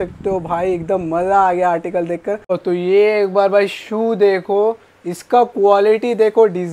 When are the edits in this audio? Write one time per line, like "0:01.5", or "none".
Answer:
0:02.6